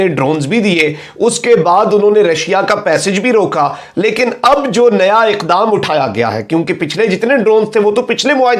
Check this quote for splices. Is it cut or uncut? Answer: uncut